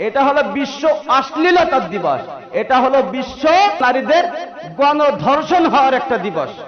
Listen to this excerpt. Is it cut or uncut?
cut